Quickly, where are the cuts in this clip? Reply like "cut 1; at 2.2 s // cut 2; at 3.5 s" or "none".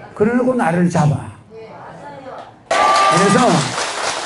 cut 1; at 2.7 s

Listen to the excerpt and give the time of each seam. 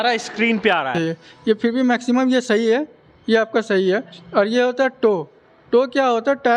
cut 1; at 0.9 s

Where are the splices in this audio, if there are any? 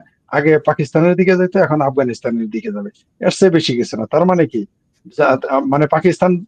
none

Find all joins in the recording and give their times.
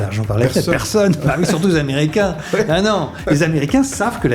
cut 1; at 3.1 s

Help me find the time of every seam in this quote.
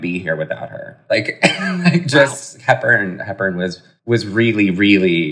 none

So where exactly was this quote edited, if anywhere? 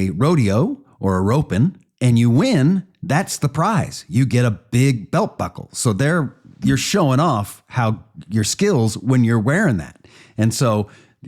cut 1; at 1.9 s

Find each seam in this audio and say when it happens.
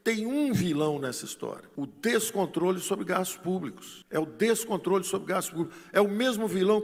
none

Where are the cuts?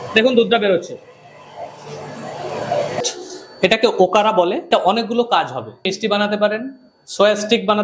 cut 1; at 3.0 s // cut 2; at 4.6 s // cut 3; at 5.9 s

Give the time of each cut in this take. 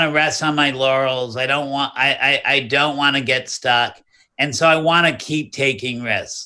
none

